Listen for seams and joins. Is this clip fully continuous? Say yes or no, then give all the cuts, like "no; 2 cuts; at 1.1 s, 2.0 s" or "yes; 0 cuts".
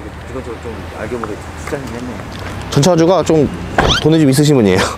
yes; 0 cuts